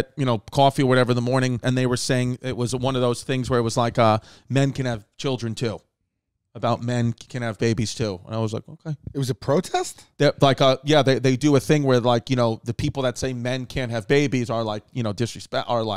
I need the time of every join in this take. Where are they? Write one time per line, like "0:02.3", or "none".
0:01.6